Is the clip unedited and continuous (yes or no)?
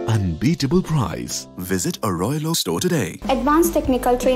no